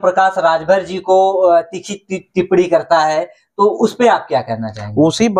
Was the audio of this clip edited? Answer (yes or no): no